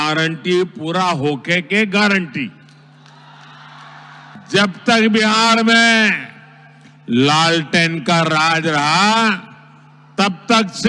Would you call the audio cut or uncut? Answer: cut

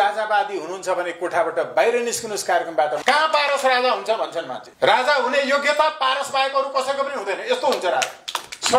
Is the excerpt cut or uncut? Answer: cut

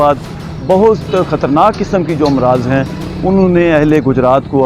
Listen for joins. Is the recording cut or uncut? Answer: uncut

